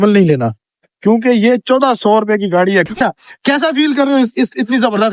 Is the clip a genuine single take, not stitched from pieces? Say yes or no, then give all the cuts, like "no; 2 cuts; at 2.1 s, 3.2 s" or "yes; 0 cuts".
no; 1 cut; at 3.0 s